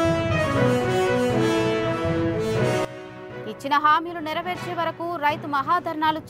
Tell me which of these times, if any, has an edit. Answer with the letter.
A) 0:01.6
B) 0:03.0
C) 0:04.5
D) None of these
B